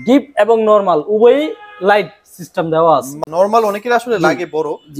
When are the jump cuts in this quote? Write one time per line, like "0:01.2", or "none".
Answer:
0:03.2